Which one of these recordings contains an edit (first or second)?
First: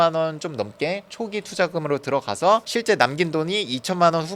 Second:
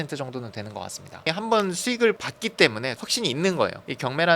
second